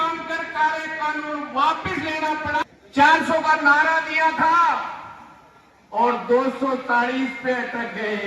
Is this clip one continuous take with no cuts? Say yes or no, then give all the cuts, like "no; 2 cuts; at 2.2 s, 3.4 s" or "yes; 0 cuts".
no; 1 cut; at 2.6 s